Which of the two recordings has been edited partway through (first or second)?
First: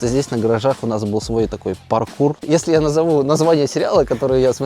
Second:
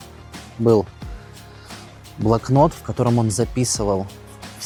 first